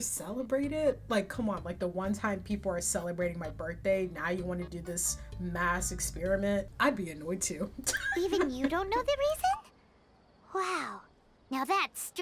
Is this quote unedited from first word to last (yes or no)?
yes